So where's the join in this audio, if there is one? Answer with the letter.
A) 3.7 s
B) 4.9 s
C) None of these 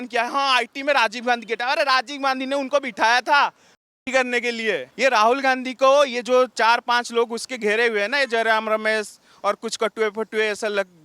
B